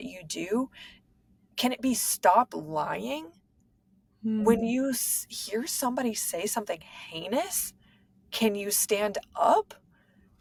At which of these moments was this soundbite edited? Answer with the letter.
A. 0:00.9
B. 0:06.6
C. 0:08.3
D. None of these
D